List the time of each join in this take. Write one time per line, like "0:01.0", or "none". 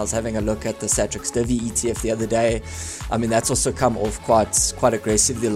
none